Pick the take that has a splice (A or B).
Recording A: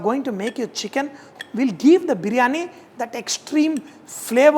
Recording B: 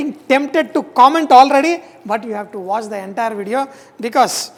A